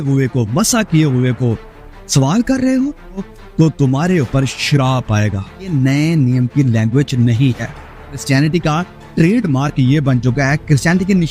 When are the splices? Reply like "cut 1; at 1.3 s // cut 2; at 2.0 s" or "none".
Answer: cut 1; at 3.3 s // cut 2; at 5.7 s // cut 3; at 8.2 s